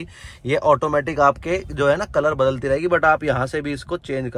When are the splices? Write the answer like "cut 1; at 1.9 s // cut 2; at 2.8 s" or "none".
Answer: none